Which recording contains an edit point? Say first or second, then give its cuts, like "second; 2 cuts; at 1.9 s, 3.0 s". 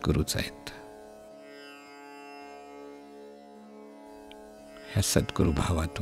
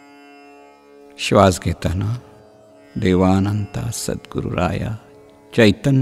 second; 1 cut; at 1.1 s